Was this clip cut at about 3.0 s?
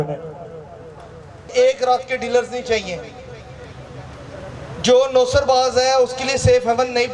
no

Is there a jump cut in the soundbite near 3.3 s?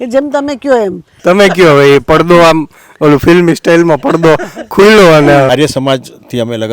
no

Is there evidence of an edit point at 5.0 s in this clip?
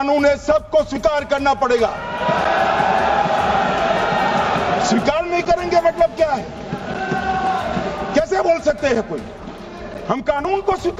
no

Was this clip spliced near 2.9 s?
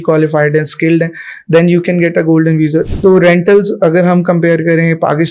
yes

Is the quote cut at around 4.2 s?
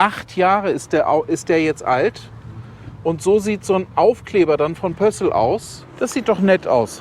no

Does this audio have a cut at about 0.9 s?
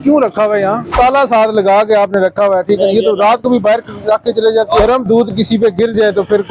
yes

